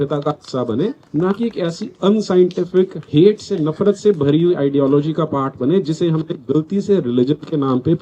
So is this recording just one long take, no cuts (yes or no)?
no